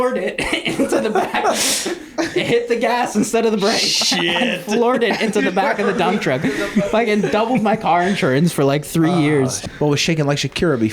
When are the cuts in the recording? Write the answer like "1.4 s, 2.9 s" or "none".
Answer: 9.6 s